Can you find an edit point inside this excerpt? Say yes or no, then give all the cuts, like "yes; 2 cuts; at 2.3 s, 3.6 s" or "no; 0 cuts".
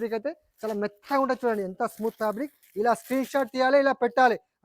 yes; 1 cut; at 2.6 s